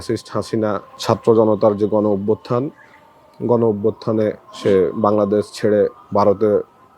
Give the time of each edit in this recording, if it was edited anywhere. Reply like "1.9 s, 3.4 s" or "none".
0.9 s, 4.5 s, 6.0 s